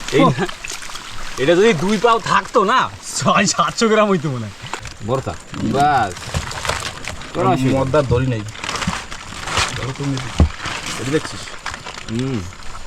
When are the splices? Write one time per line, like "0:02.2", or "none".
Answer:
0:04.9